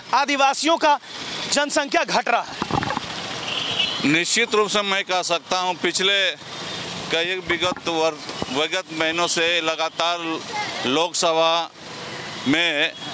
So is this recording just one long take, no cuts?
yes; 0 cuts

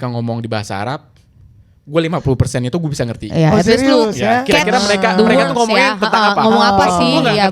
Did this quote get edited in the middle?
no; 0 cuts

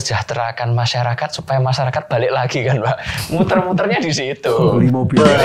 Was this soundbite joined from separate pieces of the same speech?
no; 0 cuts

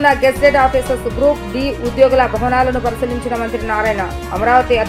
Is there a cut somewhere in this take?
no; 0 cuts

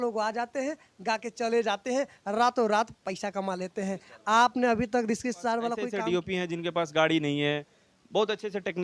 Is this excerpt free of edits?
no; 1 cut; at 5.9 s

